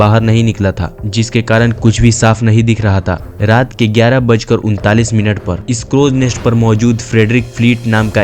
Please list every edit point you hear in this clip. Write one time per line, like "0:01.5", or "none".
0:03.3